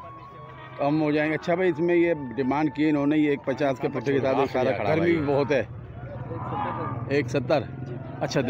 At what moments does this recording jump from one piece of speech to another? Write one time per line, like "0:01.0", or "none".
0:04.8

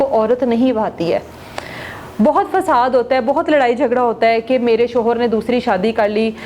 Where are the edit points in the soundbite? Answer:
none

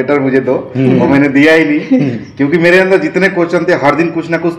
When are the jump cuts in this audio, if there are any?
none

